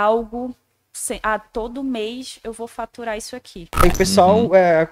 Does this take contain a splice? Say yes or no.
yes